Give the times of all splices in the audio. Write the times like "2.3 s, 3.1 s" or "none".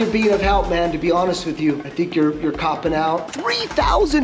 1.9 s, 3.3 s